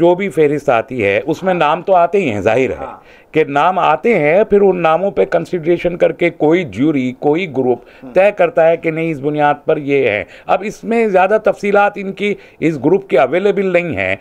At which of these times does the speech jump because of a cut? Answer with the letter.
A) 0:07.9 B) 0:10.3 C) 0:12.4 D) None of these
D